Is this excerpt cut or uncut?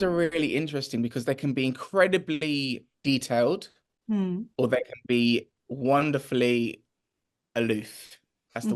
cut